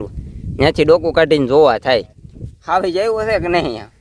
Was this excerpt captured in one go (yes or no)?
yes